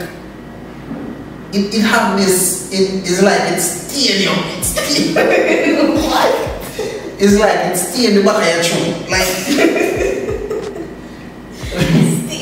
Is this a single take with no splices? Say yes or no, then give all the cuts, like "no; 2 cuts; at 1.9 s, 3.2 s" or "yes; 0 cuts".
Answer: no; 1 cut; at 9.8 s